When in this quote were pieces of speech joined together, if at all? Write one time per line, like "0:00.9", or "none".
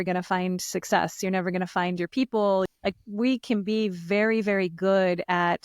0:02.7